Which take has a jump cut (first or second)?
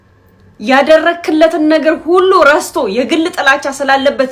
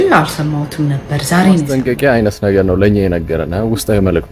second